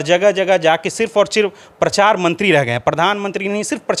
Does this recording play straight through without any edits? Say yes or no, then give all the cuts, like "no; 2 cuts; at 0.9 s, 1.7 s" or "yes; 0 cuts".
yes; 0 cuts